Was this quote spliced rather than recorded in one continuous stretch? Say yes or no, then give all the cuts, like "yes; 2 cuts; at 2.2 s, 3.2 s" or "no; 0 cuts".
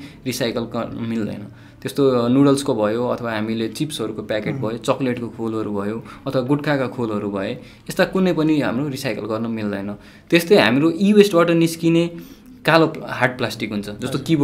no; 0 cuts